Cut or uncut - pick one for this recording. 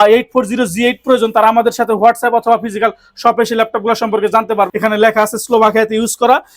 cut